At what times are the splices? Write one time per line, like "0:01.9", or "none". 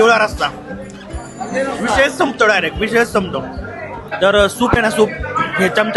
0:04.1

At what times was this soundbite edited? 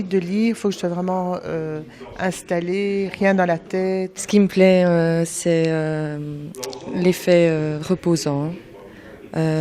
0:04.1

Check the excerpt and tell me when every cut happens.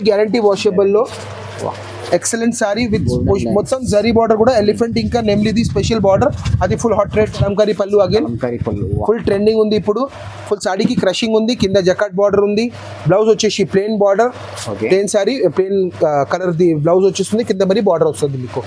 0:07.4

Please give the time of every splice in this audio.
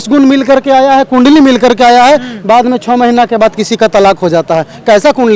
none

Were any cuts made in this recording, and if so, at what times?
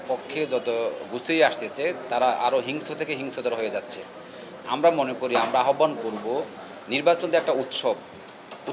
none

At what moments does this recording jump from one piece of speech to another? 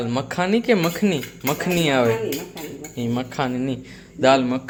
none

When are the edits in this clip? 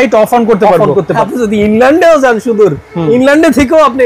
0:01.2

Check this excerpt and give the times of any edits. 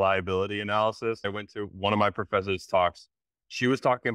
0:01.2
0:03.2

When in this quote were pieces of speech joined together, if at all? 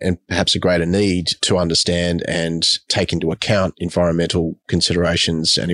none

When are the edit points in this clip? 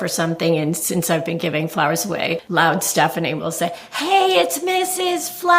0:02.4

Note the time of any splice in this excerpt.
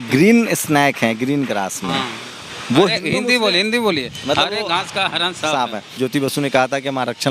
0:05.9

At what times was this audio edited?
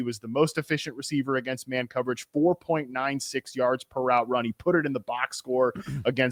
none

